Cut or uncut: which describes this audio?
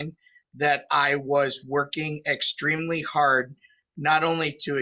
uncut